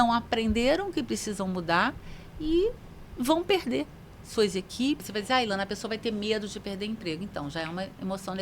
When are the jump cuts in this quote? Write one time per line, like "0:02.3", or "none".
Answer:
0:05.0